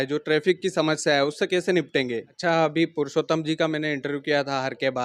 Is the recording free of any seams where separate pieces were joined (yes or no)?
no